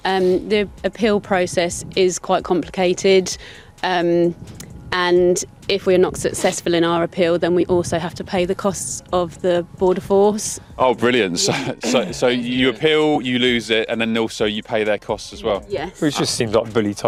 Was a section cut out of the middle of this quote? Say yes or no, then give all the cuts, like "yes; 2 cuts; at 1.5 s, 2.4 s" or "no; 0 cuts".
no; 0 cuts